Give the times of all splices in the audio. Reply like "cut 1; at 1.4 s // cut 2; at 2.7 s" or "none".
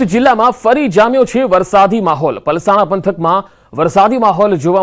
cut 1; at 2.5 s